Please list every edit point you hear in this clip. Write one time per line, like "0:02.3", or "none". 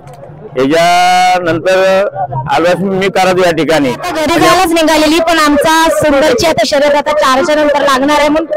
0:04.1